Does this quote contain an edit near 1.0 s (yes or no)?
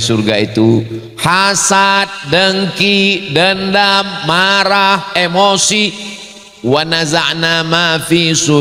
no